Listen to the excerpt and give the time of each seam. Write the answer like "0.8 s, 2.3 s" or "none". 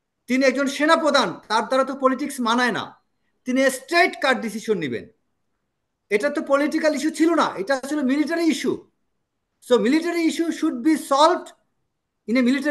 none